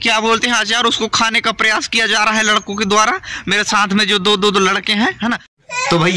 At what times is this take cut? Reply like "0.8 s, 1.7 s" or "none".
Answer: 5.1 s